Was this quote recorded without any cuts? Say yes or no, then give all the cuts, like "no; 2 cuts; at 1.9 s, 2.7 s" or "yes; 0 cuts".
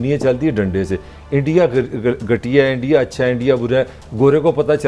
yes; 0 cuts